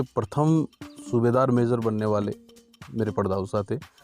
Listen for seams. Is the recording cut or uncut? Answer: uncut